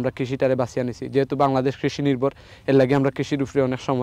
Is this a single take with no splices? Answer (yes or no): yes